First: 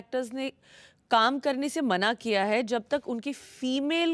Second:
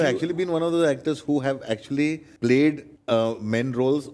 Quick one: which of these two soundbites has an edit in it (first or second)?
second